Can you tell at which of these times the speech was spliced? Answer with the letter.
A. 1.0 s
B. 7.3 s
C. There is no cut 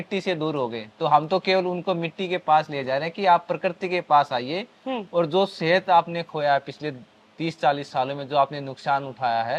C